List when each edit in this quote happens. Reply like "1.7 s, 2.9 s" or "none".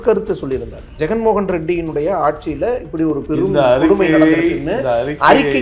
0.9 s